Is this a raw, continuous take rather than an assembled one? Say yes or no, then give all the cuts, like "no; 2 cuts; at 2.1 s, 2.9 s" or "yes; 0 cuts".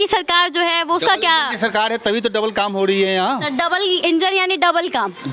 yes; 0 cuts